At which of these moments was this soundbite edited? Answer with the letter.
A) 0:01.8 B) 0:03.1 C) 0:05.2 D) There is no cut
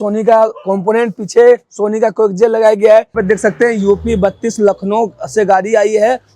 B